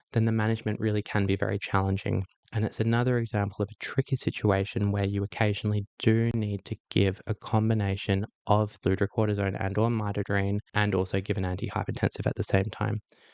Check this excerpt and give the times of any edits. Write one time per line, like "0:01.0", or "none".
0:08.8
0:10.7

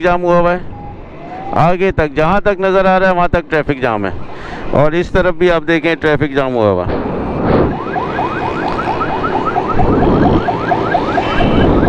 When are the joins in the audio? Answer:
none

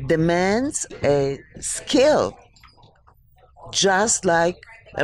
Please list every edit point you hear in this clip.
0:00.9

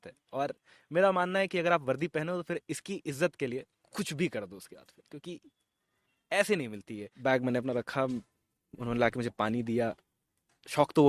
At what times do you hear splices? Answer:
0:07.0

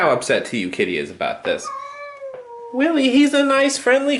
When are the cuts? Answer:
none

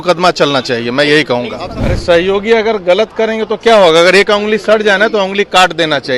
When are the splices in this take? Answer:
0:01.6

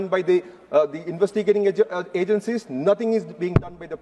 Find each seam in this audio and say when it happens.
none

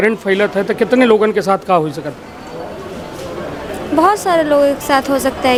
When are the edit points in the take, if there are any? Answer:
none

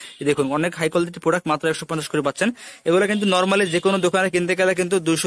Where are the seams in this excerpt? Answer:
none

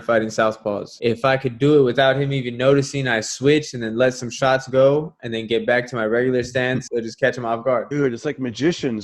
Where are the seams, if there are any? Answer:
0:00.9
0:06.8
0:07.9

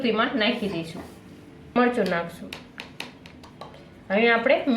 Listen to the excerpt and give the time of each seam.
0:01.8

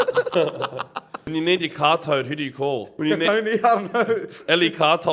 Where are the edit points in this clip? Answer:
0:01.2
0:02.9

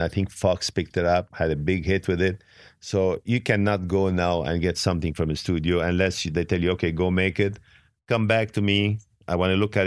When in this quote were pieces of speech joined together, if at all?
0:01.3

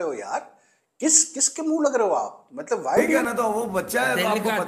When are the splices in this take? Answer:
0:03.2

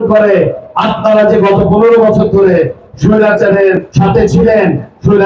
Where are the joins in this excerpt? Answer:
none

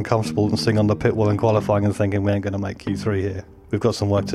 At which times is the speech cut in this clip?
0:03.4

